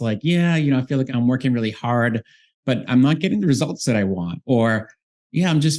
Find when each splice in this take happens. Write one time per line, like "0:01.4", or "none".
0:01.1
0:02.9